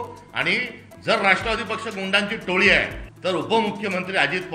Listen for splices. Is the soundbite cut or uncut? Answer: cut